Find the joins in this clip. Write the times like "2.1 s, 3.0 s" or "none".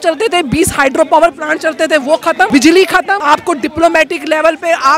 2.5 s, 3.2 s